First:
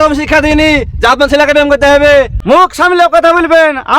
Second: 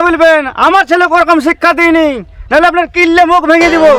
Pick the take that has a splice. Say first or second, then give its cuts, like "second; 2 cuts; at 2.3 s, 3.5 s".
first; 1 cut; at 2.4 s